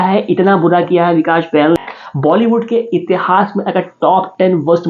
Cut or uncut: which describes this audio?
cut